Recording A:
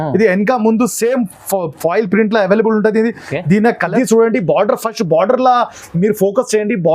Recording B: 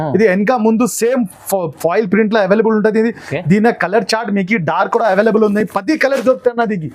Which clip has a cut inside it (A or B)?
A